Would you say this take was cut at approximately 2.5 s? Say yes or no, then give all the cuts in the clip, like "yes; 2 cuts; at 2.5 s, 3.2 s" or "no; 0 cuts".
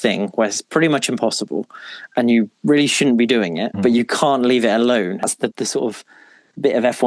no; 1 cut; at 5.2 s